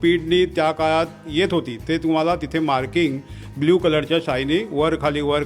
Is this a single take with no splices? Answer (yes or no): yes